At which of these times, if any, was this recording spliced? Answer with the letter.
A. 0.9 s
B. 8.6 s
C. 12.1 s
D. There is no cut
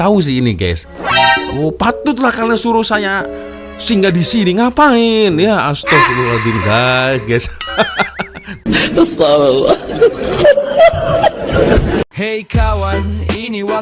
C